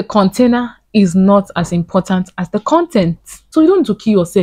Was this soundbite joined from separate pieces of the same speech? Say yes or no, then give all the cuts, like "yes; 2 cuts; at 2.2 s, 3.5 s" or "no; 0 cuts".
yes; 1 cut; at 3.3 s